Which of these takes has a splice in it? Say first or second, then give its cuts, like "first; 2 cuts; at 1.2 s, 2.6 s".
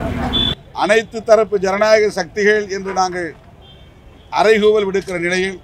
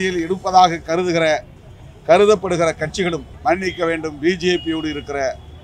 second; 1 cut; at 3.3 s